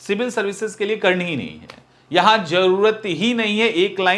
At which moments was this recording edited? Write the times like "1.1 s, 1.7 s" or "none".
none